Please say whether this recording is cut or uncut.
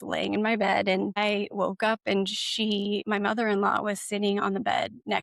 cut